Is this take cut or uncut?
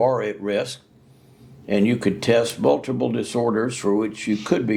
uncut